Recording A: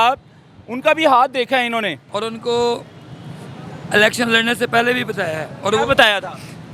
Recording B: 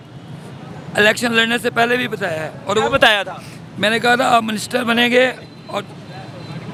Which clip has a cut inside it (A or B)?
A